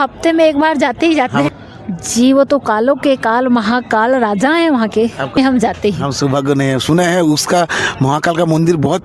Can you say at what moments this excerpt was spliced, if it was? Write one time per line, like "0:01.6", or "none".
0:01.5
0:05.4